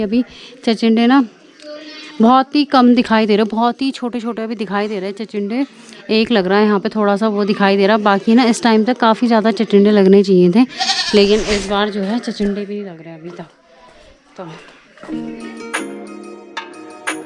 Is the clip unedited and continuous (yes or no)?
yes